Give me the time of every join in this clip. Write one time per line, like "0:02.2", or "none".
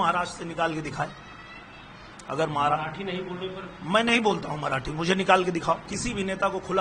0:05.9